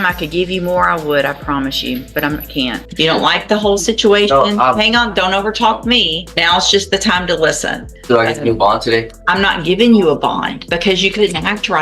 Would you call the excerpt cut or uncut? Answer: cut